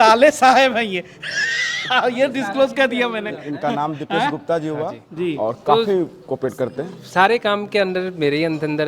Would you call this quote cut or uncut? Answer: uncut